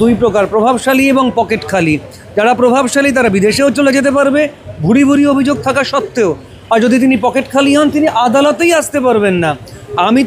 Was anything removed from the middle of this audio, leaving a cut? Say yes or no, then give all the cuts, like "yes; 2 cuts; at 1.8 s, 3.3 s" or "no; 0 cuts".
no; 0 cuts